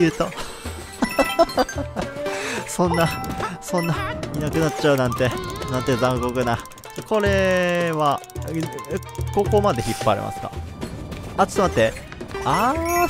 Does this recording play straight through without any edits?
yes; 0 cuts

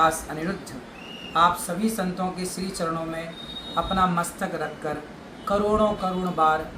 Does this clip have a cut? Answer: no; 0 cuts

